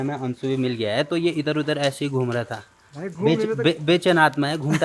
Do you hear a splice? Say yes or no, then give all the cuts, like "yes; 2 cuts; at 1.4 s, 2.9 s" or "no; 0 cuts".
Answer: no; 0 cuts